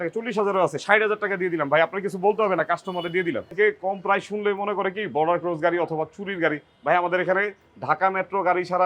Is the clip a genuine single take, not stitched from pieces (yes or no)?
no